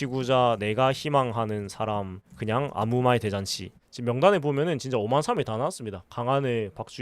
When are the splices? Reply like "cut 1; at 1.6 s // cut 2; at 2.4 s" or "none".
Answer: cut 1; at 3.8 s

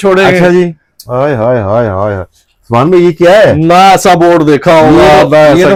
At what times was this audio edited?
none

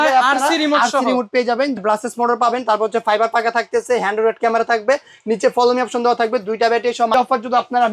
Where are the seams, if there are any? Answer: cut 1; at 1.8 s // cut 2; at 7.1 s

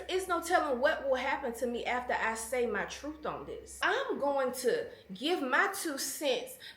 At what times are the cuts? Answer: cut 1; at 3.8 s

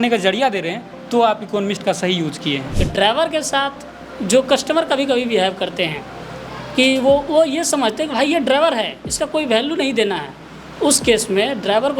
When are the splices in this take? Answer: cut 1; at 2.8 s

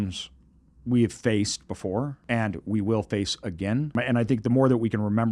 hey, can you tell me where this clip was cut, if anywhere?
cut 1; at 2.2 s // cut 2; at 3.9 s

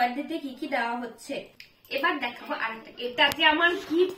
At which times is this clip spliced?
cut 1; at 1.5 s

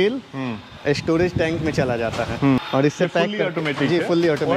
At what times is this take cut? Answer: cut 1; at 2.6 s

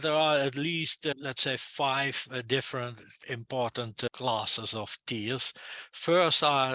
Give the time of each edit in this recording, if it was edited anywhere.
cut 1; at 1.1 s // cut 2; at 3.2 s // cut 3; at 4.1 s

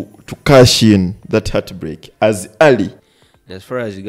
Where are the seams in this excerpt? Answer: cut 1; at 3.0 s

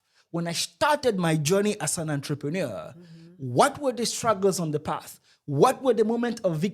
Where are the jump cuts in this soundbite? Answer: none

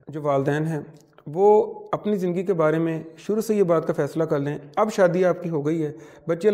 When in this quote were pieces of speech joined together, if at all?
none

